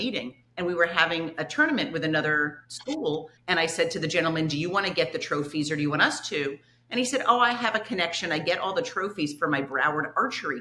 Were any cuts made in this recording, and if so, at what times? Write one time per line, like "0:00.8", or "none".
0:03.0